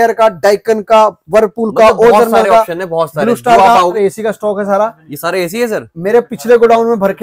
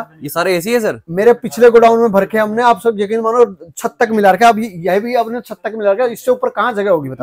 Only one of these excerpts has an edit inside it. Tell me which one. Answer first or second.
first